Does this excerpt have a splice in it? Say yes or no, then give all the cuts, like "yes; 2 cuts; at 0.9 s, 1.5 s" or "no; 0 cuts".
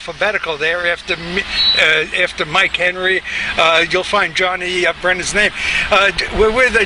yes; 1 cut; at 3.0 s